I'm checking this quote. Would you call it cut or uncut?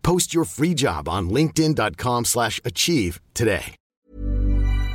cut